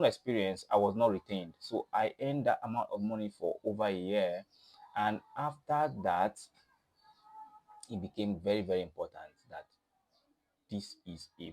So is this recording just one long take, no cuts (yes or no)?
yes